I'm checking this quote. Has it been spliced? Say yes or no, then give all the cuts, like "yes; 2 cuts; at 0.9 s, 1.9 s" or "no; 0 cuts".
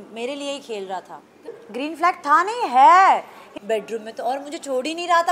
yes; 2 cuts; at 1.5 s, 3.4 s